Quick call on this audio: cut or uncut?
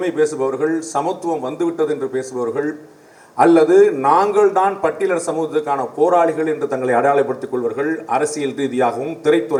uncut